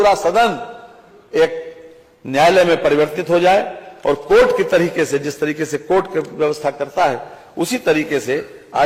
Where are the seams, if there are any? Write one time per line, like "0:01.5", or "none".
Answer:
none